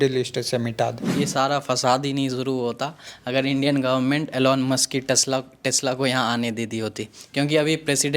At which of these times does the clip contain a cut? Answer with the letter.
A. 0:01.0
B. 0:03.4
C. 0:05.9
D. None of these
A